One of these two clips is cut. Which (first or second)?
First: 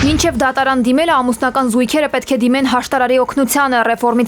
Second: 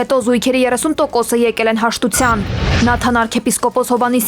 second